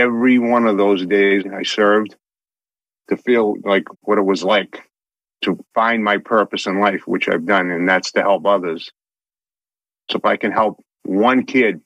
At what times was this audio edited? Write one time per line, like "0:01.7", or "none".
0:01.4
0:05.4